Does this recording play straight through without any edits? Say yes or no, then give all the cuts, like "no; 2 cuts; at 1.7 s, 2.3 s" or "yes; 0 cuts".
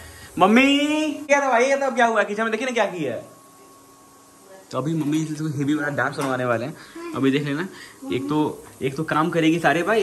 yes; 0 cuts